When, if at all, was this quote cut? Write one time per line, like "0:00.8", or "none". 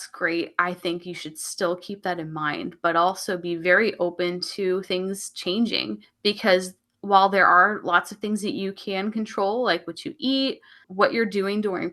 0:06.0

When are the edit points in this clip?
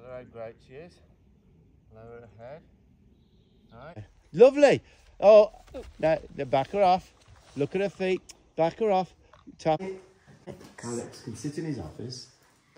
0:04.1
0:09.8

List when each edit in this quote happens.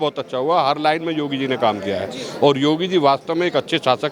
none

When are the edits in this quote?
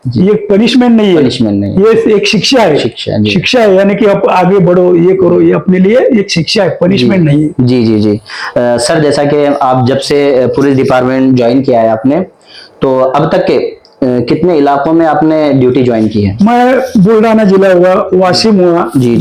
none

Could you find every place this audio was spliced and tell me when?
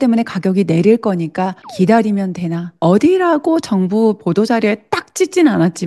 0:01.6
0:02.6

